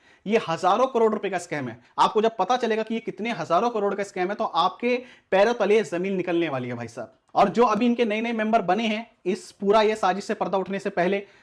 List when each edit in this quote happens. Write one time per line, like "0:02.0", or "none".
0:01.8
0:07.1